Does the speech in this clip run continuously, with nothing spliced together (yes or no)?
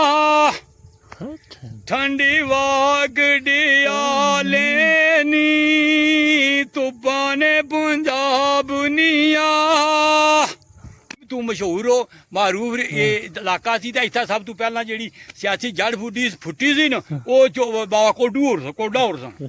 yes